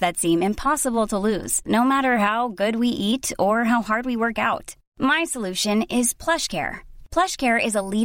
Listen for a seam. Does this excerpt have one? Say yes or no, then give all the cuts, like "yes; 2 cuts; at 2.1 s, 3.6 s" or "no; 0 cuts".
no; 0 cuts